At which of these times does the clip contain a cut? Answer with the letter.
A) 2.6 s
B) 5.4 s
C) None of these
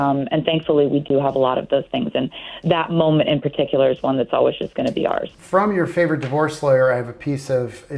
B